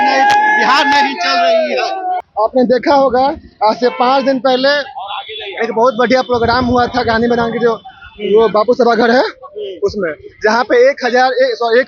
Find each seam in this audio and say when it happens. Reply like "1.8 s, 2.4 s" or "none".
2.2 s